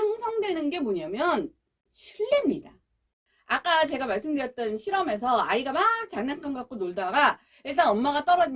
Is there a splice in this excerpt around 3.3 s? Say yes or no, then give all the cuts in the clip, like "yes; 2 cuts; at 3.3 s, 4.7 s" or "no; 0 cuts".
yes; 1 cut; at 3.3 s